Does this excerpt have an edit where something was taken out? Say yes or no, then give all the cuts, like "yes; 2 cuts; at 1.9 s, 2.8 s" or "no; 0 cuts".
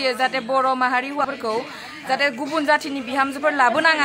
yes; 1 cut; at 1.2 s